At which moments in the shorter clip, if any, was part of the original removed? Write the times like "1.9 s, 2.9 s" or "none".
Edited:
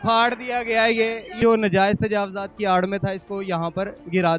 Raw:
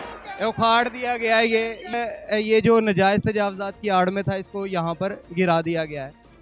1.4 s